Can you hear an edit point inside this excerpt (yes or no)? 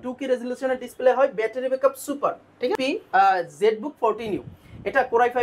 yes